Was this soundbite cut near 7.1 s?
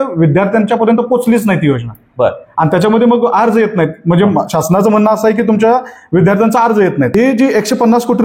yes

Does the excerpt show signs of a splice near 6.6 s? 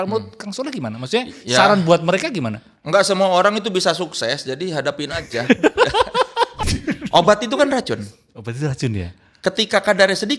yes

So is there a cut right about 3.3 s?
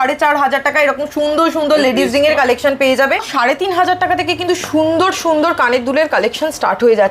yes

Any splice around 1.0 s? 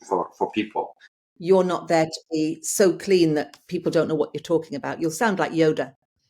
yes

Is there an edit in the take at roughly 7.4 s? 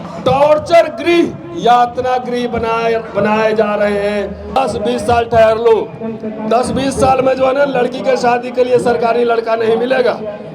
no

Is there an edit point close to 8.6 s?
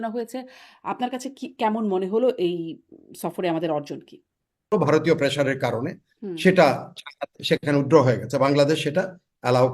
no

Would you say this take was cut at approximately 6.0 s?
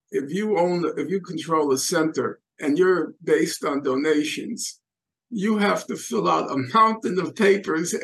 no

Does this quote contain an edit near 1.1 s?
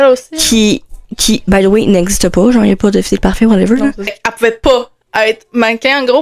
no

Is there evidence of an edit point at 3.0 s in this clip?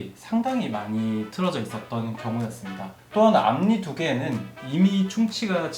yes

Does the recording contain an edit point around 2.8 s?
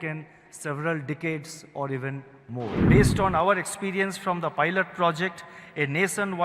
yes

